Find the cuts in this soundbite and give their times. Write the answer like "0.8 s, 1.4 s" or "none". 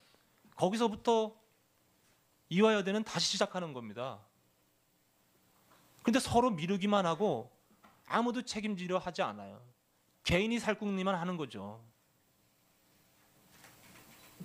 2.9 s